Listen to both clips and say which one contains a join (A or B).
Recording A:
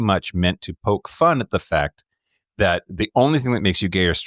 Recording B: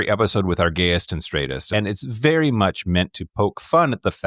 B